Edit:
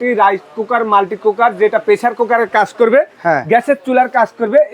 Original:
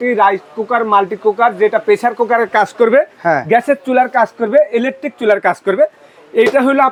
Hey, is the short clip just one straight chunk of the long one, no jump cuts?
yes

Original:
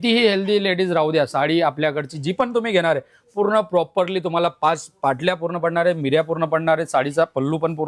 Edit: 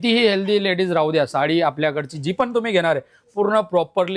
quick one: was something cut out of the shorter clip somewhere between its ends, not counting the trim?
no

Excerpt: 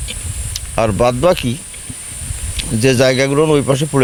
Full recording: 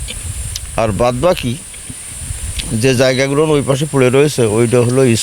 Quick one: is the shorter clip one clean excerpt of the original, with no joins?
yes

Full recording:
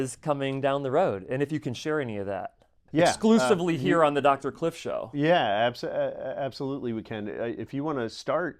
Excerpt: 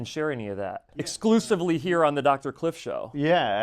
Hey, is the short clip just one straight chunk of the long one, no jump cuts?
no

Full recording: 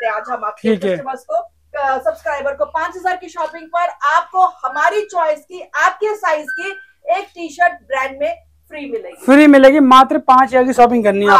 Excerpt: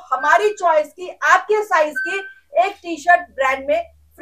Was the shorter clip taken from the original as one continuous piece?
yes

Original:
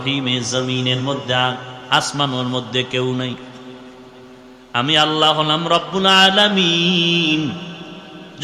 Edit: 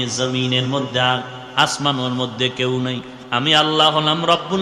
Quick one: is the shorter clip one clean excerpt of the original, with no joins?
no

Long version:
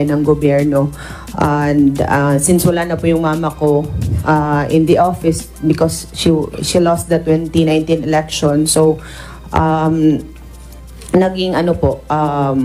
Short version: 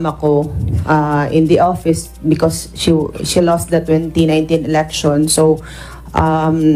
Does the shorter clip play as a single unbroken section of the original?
yes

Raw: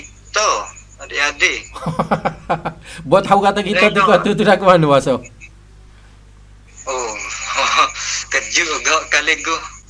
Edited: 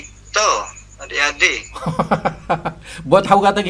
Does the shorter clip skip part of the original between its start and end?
no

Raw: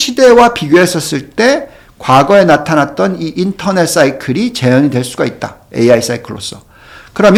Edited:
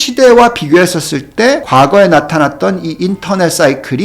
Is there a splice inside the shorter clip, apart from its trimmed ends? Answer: yes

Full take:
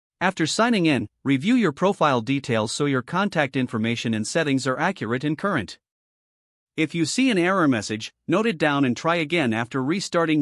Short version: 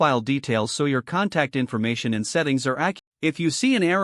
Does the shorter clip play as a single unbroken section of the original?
no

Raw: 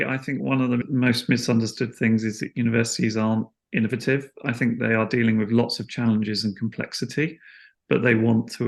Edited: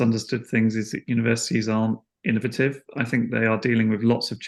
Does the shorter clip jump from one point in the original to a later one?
no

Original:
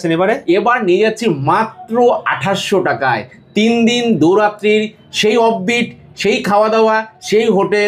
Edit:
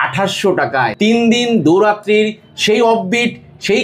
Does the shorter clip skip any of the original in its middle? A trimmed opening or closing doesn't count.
yes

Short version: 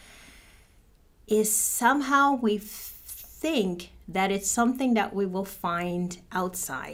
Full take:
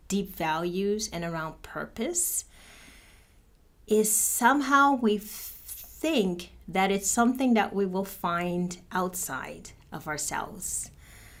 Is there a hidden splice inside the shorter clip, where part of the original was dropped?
no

